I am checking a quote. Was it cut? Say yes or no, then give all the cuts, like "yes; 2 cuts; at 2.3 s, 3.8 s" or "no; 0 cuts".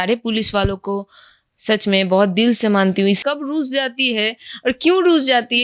yes; 1 cut; at 3.2 s